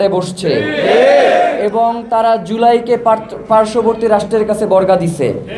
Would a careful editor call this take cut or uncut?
uncut